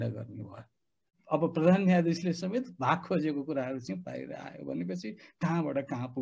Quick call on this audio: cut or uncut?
cut